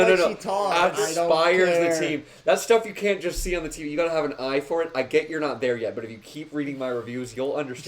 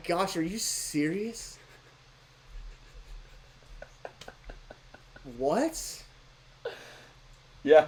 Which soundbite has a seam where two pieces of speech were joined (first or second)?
first